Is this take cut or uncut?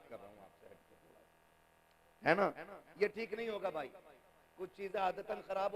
uncut